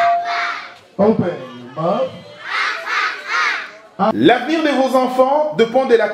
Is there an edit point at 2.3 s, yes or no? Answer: no